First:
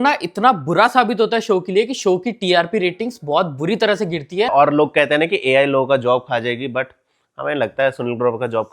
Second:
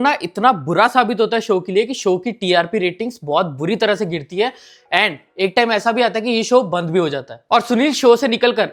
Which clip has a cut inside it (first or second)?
first